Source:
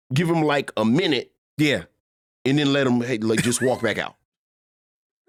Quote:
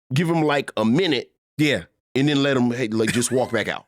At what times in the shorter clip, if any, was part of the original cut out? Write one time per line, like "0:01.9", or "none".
0:01.9